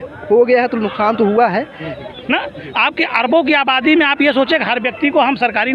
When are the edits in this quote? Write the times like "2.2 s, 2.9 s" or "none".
2.0 s

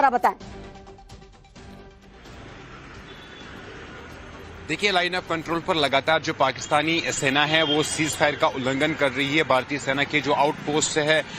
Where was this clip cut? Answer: 5.8 s

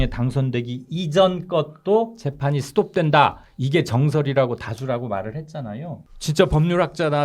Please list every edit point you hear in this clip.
6.1 s

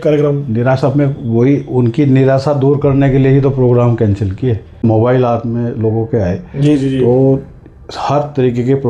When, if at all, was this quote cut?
4.8 s

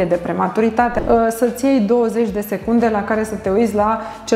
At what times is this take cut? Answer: 0.9 s

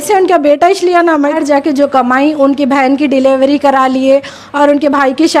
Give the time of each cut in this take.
1.4 s

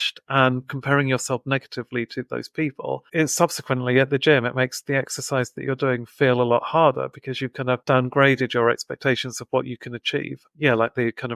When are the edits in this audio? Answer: 3.0 s, 7.8 s

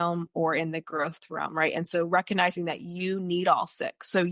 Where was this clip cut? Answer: none

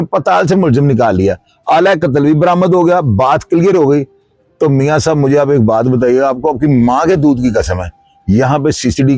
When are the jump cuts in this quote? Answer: none

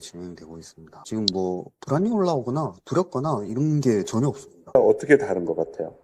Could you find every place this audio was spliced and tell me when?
0.9 s, 4.8 s

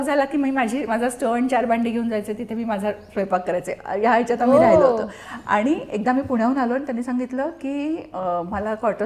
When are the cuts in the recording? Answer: none

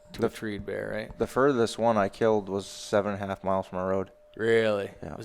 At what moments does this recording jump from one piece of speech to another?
4.2 s

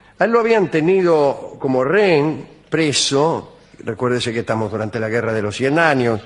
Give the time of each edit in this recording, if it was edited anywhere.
4.4 s

